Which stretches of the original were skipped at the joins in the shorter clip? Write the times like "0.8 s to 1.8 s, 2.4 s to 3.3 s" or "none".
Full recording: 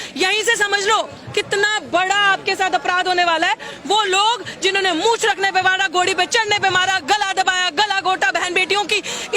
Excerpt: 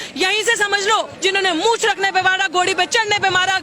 1.1 s to 4.5 s